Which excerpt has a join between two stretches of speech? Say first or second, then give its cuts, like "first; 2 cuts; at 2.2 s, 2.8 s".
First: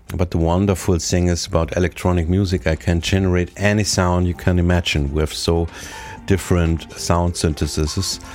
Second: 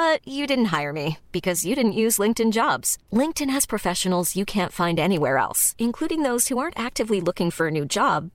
first; 1 cut; at 7.0 s